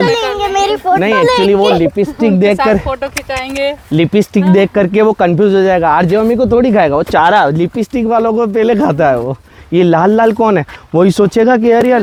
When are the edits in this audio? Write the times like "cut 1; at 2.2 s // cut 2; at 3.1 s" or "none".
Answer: none